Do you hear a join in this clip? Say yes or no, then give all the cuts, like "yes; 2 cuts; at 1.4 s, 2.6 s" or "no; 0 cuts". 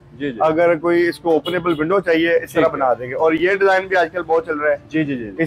no; 0 cuts